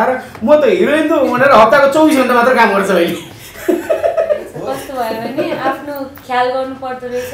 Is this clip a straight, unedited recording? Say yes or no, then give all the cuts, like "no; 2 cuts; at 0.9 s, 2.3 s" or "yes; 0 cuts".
no; 1 cut; at 4.5 s